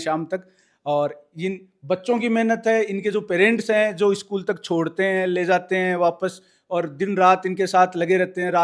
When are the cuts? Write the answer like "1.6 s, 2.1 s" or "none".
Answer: none